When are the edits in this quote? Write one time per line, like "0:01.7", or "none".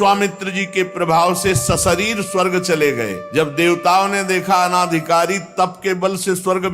0:03.2